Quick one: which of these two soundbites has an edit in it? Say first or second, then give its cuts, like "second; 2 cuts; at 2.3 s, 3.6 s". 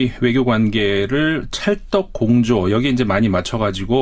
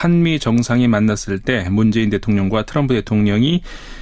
second; 1 cut; at 2.5 s